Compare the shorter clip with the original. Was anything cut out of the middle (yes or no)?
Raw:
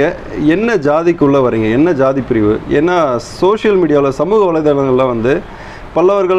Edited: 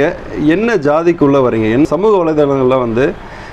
yes